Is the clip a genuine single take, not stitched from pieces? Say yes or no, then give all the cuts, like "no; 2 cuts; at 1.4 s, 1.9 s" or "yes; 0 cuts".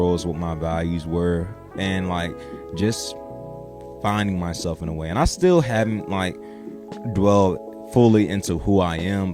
yes; 0 cuts